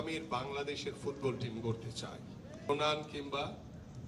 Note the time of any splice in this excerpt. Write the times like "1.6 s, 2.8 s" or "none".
2.7 s